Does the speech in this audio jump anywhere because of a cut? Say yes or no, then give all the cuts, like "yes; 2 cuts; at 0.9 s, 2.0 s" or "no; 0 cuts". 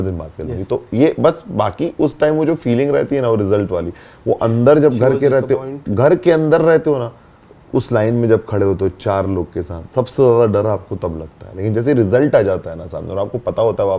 no; 0 cuts